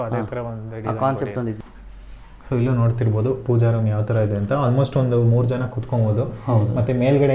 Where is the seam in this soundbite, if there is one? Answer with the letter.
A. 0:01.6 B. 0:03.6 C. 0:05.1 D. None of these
A